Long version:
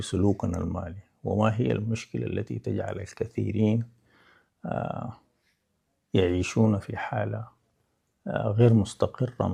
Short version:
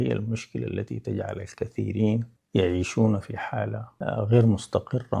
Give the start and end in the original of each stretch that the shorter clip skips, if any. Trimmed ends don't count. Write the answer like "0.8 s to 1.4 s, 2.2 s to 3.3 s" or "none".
4.0 s to 6.0 s, 7.5 s to 8.1 s